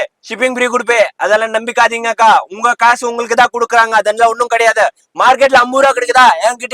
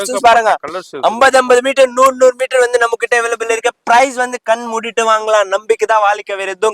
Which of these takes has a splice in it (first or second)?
first